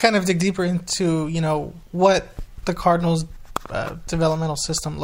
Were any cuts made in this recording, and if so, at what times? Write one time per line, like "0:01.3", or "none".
0:01.8